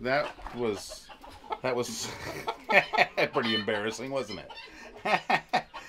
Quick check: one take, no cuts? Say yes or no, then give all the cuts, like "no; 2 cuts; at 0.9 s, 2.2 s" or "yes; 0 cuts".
yes; 0 cuts